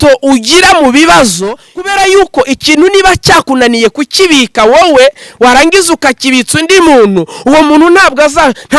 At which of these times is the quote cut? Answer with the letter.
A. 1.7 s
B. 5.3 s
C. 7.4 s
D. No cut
A